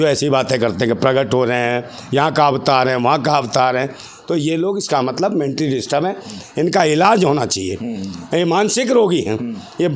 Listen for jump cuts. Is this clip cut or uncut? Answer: uncut